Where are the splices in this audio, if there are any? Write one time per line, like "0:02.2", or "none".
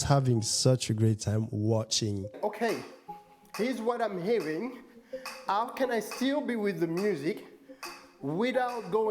0:02.3